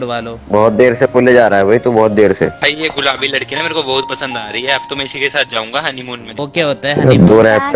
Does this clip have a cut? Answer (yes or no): yes